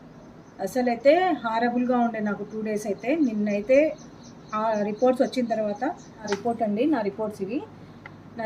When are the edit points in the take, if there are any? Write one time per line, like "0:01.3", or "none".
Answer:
0:06.3